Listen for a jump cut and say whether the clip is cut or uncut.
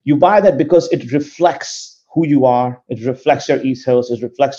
uncut